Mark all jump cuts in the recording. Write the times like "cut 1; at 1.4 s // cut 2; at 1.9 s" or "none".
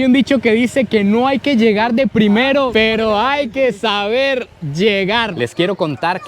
cut 1; at 5.3 s